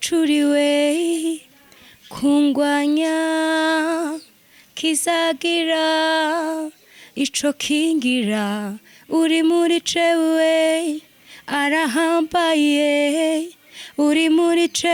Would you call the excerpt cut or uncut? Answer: uncut